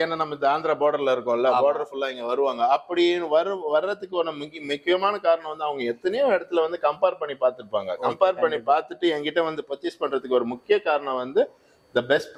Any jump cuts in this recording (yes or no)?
no